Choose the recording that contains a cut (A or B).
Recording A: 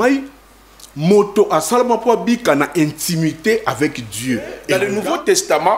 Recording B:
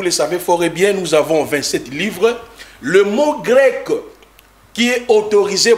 A